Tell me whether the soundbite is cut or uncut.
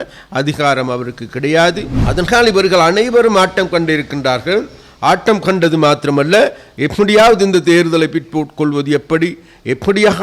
cut